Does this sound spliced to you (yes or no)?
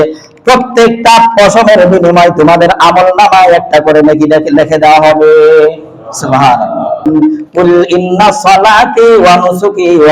yes